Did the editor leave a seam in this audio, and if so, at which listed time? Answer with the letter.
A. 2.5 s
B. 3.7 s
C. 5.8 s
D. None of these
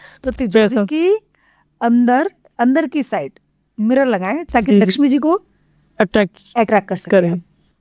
D